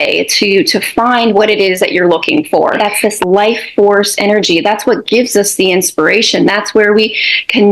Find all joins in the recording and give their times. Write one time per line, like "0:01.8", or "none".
0:02.8